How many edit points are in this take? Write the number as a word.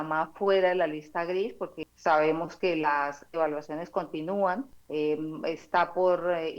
two